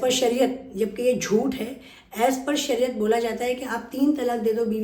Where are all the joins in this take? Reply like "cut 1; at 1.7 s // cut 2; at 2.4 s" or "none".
none